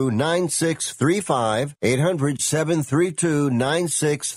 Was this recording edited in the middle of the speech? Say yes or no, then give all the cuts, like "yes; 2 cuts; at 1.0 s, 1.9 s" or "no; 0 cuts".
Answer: yes; 1 cut; at 1.7 s